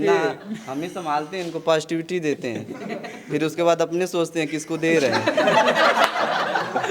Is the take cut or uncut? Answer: uncut